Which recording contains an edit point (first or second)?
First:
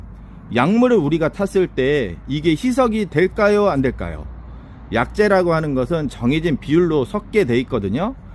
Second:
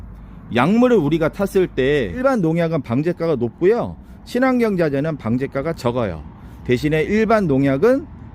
second